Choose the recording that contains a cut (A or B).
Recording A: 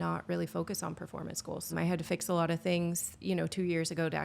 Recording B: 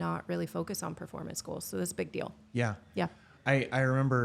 A